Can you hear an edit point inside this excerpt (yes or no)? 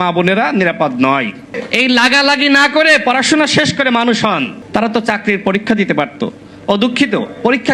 yes